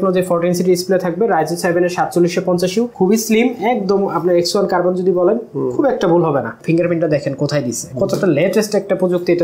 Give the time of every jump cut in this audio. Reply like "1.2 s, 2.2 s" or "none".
2.9 s, 6.6 s, 7.9 s